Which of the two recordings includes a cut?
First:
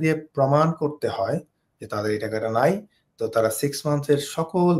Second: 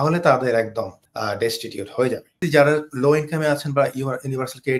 second; 2 cuts; at 1.0 s, 2.4 s

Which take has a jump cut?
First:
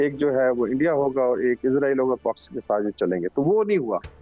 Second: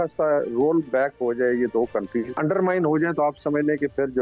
second; 1 cut; at 2.4 s

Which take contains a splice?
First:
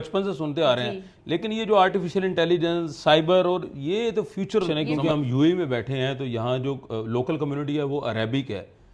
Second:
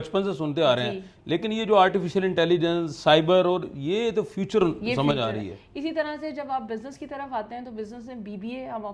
first; 1 cut; at 4.7 s

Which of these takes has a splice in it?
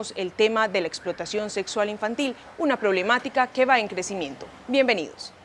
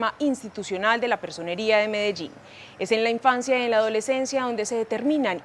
second; 1 cut; at 2.6 s

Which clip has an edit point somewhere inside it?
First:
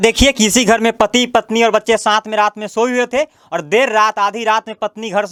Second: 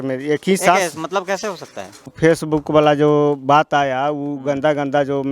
second; 1 cut; at 2.1 s

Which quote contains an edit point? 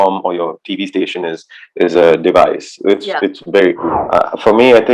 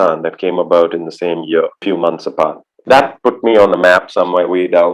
first; 1 cut; at 4.0 s

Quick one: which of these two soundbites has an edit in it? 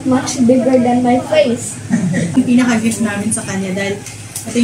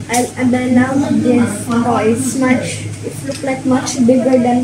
first; 1 cut; at 2.4 s

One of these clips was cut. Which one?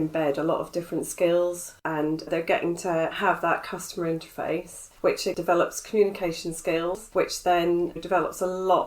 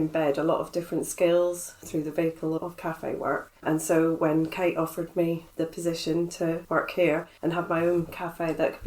first; 2 cuts; at 1.7 s, 5.3 s

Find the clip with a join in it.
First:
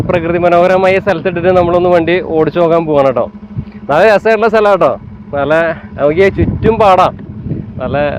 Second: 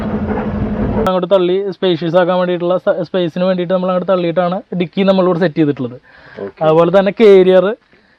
second; 1 cut; at 1.1 s

